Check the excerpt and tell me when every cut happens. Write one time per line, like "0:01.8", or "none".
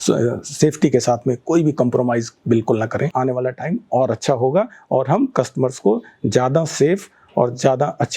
0:03.1